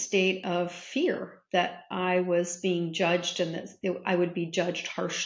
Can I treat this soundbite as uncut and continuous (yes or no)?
yes